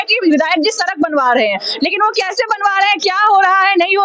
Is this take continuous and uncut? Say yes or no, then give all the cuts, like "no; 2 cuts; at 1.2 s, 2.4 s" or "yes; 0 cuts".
yes; 0 cuts